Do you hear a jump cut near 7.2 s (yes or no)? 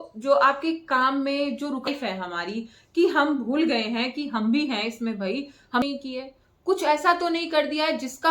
no